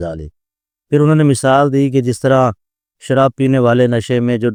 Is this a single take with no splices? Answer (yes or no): yes